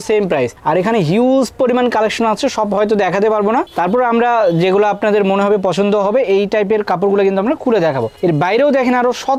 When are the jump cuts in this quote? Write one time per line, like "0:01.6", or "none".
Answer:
none